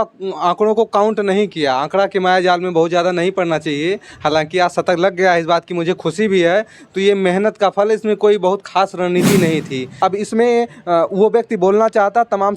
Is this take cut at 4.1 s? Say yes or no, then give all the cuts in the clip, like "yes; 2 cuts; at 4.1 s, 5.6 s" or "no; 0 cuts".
no; 1 cut; at 9.9 s